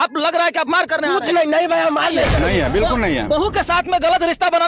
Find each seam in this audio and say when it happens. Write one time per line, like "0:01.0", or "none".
0:02.4